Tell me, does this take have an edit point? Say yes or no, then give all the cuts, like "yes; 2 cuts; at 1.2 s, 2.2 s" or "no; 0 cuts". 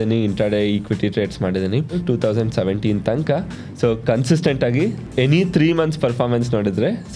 yes; 2 cuts; at 2.0 s, 5.0 s